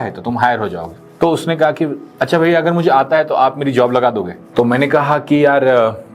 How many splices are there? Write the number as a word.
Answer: one